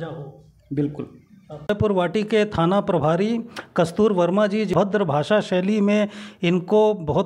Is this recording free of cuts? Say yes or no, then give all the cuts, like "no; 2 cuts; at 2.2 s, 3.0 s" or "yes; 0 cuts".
no; 2 cuts; at 1.7 s, 4.7 s